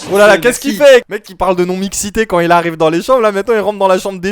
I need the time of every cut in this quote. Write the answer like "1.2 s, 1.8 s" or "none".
1.1 s